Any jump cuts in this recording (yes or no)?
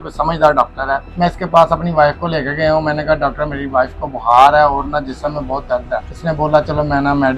yes